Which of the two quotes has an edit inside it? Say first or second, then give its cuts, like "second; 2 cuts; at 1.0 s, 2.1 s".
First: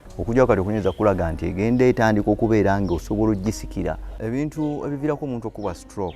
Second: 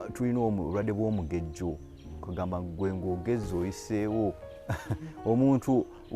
first; 1 cut; at 4.1 s